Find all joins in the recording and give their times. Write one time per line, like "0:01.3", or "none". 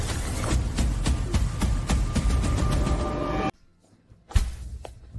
0:03.5